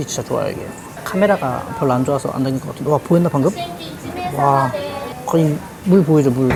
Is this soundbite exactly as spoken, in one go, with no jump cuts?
yes; 0 cuts

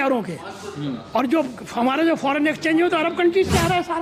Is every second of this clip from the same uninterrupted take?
yes; 0 cuts

